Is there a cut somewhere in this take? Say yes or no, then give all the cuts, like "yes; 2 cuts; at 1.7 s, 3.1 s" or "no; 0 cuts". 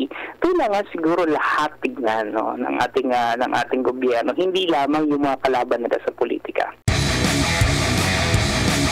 yes; 1 cut; at 6.8 s